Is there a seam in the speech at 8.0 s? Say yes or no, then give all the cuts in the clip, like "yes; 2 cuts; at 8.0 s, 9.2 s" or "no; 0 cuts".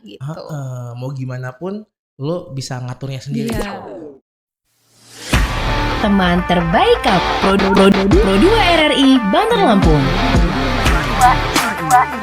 no; 1 cut; at 3.7 s